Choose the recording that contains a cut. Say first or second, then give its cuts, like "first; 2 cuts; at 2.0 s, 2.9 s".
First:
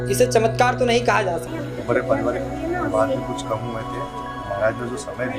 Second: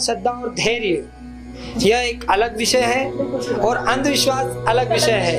first; 1 cut; at 1.5 s